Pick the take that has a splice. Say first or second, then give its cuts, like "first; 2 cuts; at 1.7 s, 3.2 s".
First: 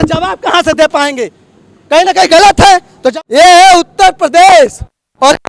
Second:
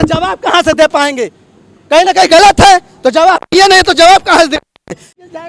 first; 1 cut; at 3.0 s